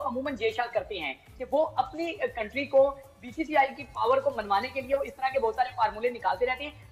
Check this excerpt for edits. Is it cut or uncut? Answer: uncut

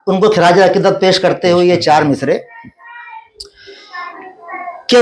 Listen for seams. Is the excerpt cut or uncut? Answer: uncut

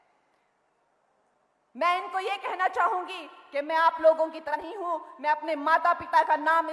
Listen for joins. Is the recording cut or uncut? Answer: uncut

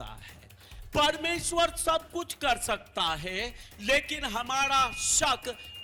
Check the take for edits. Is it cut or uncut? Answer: uncut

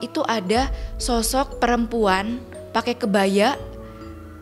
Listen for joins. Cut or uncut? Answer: uncut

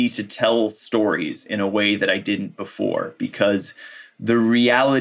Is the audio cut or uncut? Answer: uncut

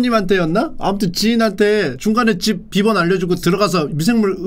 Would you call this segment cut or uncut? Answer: uncut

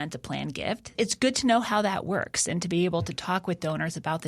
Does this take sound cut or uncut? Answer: cut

